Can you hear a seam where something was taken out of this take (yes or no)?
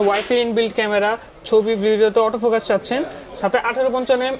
no